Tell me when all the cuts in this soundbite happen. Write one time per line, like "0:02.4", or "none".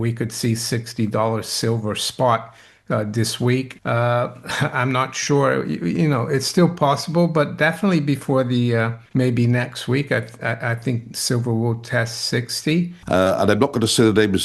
0:03.8
0:09.0
0:13.0